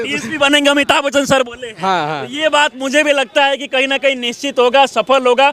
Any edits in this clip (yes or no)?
no